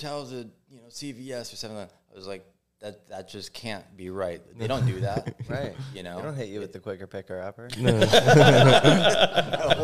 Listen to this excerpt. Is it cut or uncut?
uncut